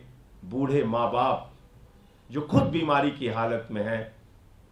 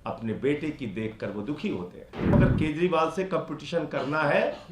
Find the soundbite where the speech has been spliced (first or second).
second